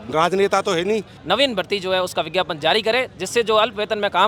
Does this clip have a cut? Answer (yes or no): yes